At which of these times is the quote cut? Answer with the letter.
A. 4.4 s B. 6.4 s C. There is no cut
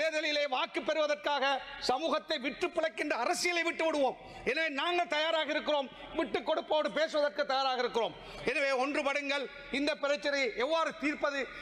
C